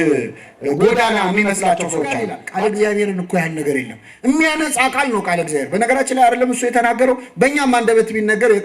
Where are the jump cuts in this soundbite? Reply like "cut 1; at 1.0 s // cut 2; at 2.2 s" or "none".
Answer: cut 1; at 2.4 s